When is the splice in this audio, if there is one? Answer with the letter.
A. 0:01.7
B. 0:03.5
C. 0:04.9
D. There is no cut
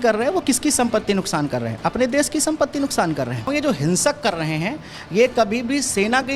B